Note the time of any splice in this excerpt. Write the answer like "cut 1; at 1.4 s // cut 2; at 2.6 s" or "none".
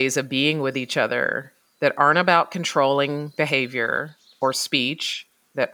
cut 1; at 4.2 s